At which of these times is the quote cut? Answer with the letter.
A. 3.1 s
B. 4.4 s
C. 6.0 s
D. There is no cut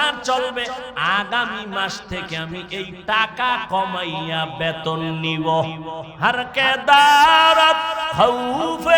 C